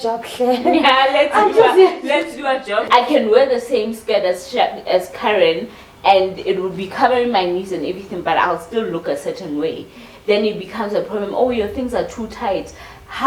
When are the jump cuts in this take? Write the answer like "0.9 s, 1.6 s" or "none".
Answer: 2.9 s